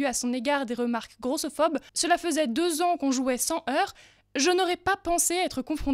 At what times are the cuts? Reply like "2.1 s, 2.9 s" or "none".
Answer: 1.9 s